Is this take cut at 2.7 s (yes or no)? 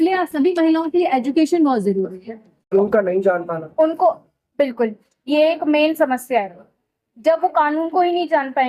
yes